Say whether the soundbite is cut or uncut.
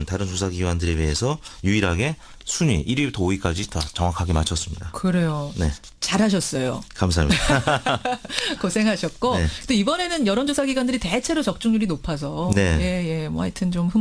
cut